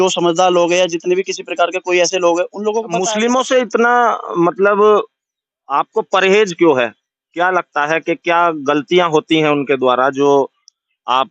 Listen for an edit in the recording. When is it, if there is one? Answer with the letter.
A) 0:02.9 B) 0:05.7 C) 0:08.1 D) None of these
A